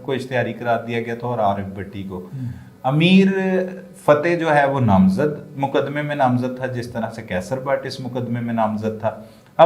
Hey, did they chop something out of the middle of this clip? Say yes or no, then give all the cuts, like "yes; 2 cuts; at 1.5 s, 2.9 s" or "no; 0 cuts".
no; 0 cuts